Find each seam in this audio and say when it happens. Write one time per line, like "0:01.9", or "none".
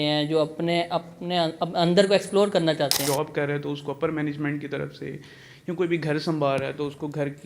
0:03.0

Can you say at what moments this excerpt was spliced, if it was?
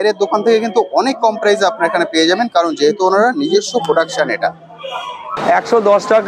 0:05.3

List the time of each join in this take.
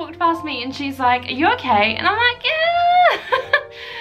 none

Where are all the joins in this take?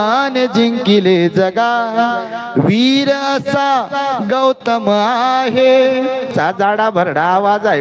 0:06.3

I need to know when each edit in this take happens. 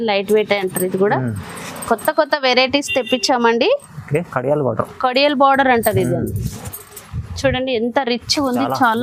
none

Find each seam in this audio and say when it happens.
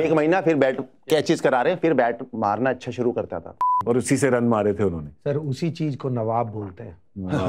0:03.6

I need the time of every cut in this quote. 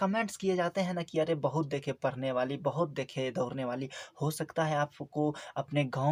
none

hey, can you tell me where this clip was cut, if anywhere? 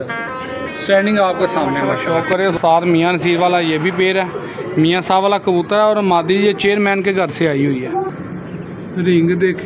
0:02.0
0:08.1

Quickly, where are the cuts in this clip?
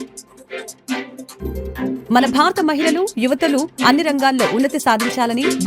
0:01.1

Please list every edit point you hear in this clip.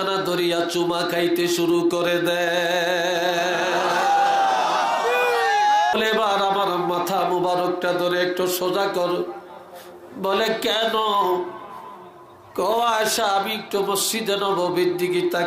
0:05.9

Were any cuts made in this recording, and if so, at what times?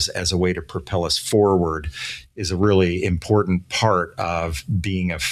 none

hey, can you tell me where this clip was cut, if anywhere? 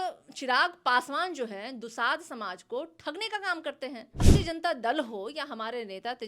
0:04.3

